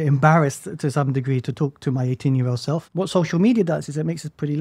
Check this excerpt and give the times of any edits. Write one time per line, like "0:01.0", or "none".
0:02.9